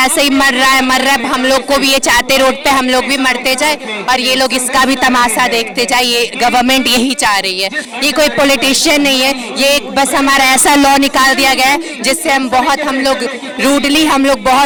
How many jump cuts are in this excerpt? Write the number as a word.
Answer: zero